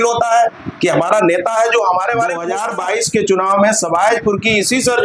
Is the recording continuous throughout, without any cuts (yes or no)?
no